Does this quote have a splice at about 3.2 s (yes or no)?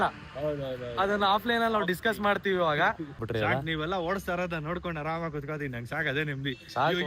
yes